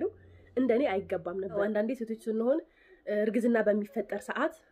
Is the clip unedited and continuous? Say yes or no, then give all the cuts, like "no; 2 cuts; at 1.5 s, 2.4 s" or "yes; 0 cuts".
no; 1 cut; at 1.6 s